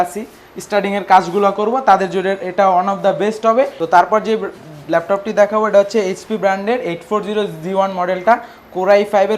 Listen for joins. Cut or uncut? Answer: cut